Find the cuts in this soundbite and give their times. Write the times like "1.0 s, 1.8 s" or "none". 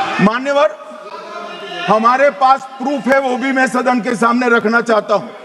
none